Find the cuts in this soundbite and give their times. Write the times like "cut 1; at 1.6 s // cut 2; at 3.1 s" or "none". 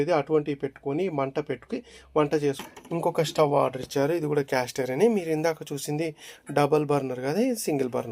cut 1; at 2.7 s